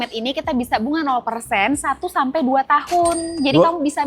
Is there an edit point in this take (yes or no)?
no